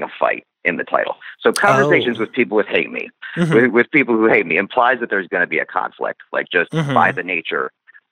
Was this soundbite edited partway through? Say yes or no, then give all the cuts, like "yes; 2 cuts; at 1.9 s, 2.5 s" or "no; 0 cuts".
no; 0 cuts